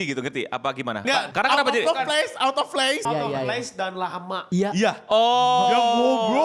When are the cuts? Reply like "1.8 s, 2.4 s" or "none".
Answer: 1.3 s, 3.0 s